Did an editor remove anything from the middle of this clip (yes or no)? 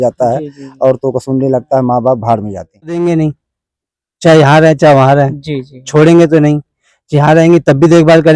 yes